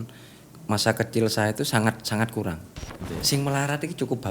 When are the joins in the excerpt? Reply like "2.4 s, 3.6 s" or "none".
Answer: 2.9 s